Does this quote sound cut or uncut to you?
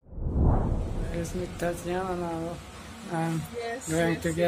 cut